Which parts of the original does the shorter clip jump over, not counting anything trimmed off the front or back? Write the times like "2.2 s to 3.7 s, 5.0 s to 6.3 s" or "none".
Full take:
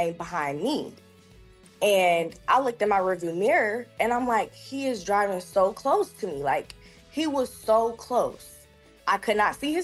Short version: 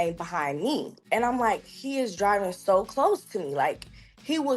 1.0 s to 3.9 s